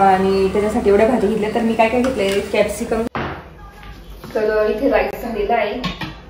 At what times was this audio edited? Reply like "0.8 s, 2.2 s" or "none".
3.1 s